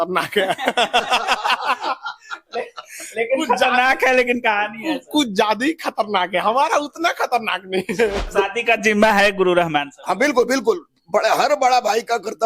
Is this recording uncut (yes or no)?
no